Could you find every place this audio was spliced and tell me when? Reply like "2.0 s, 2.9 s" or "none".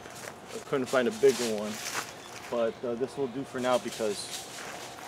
none